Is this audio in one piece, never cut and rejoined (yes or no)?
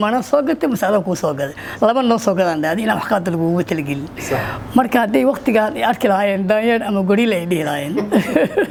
yes